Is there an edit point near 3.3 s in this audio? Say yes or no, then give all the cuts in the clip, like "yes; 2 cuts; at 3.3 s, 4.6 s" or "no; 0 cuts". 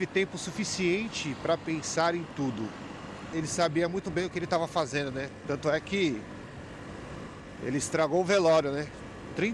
yes; 1 cut; at 3.3 s